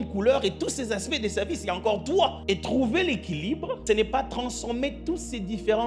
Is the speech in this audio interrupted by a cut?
yes; 2 cuts; at 2.4 s, 3.8 s

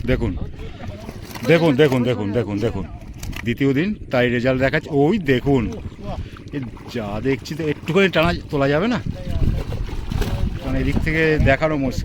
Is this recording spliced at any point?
yes; 1 cut; at 3.4 s

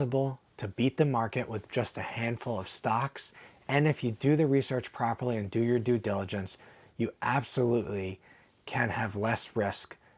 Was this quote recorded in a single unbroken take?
yes; 0 cuts

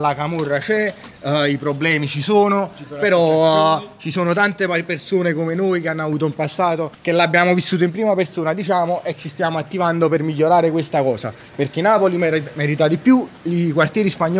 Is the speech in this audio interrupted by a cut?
no; 0 cuts

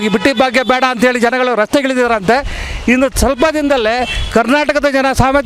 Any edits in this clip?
no; 0 cuts

